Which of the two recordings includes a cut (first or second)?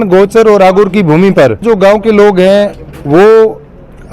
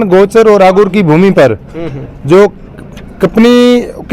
first